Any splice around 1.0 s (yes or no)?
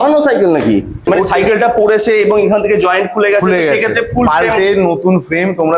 yes